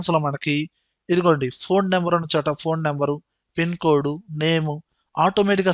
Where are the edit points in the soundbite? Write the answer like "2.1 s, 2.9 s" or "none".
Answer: none